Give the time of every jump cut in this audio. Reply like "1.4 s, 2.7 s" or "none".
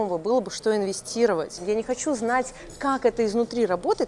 1.6 s